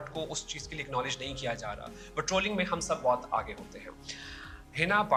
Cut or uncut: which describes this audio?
uncut